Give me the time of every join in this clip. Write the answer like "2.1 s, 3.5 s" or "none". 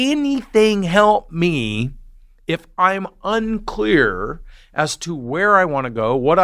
none